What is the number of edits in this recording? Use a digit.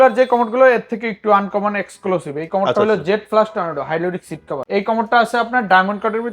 1